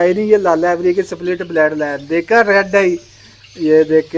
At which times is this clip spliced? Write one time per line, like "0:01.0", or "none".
none